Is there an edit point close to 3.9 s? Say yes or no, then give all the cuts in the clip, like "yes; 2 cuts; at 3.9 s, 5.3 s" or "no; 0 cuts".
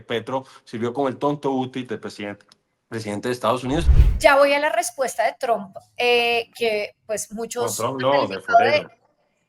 yes; 1 cut; at 3.9 s